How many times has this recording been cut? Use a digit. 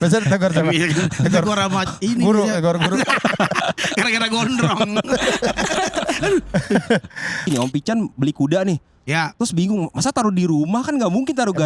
1